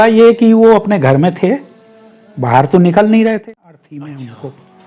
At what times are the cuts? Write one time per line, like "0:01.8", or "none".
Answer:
0:03.4